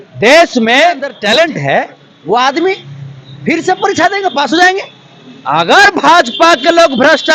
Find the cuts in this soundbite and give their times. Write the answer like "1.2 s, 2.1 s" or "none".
1.1 s